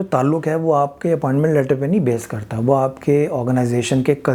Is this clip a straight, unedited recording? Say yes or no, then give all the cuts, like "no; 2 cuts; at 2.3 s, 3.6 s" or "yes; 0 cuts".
yes; 0 cuts